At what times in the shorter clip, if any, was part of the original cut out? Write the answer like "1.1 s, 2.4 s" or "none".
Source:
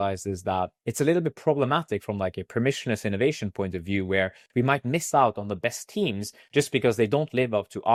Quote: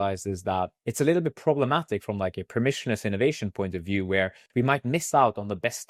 none